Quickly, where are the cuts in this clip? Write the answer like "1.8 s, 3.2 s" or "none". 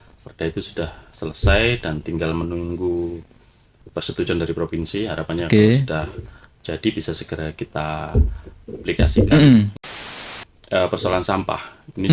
10.0 s